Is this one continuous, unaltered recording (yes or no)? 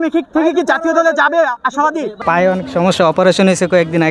no